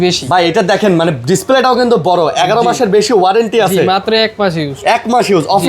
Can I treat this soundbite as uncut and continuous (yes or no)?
yes